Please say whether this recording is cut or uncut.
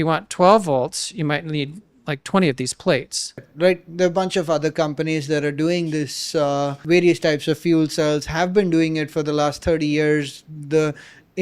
cut